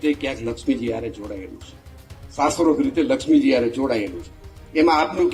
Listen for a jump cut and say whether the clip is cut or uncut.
uncut